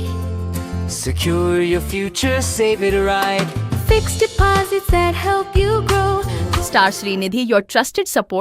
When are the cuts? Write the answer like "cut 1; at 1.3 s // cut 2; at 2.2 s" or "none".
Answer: cut 1; at 6.4 s